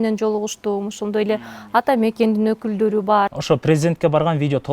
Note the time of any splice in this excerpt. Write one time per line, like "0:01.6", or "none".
0:03.4